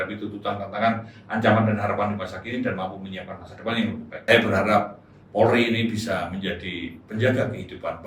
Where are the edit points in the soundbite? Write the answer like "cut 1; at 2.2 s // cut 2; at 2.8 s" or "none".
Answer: cut 1; at 4.1 s